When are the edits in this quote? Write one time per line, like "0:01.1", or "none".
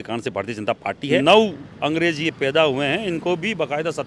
0:01.2

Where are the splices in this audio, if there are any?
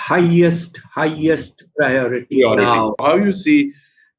0:03.0

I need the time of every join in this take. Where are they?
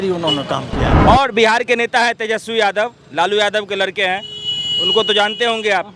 0:00.9

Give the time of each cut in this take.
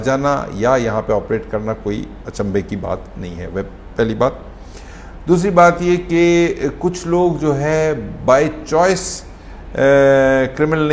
none

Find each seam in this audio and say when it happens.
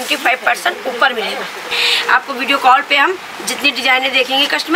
0:01.8

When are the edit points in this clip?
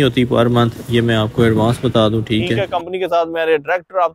0:02.5

